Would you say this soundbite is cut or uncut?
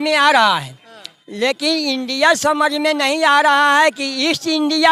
uncut